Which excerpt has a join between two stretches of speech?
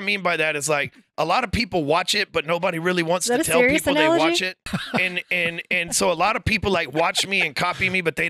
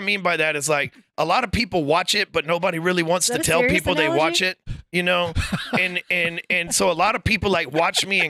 first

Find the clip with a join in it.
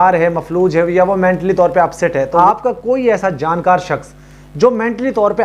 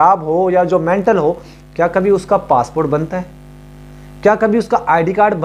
first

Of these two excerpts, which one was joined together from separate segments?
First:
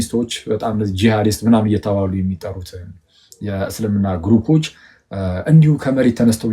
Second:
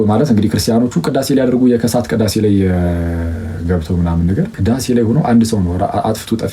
second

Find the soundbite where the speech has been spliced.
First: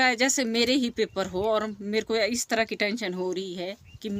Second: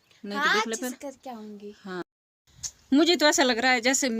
second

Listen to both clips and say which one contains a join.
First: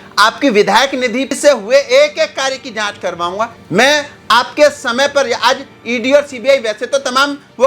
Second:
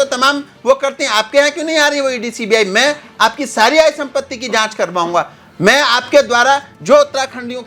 first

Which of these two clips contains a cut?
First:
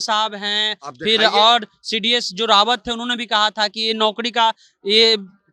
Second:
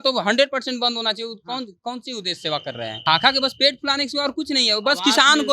second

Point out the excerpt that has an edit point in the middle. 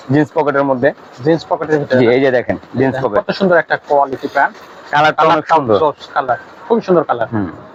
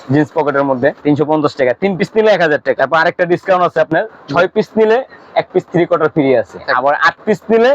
second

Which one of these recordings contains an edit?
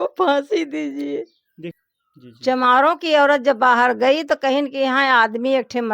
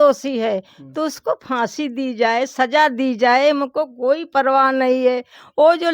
first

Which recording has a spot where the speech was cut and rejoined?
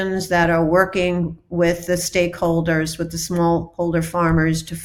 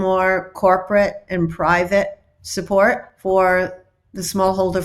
second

